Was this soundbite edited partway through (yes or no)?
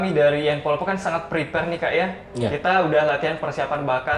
no